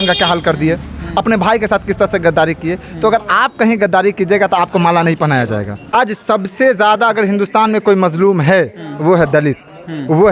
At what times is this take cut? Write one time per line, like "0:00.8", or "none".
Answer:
0:05.9